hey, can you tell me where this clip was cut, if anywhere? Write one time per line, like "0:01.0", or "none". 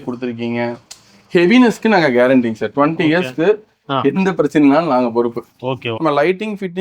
0:05.9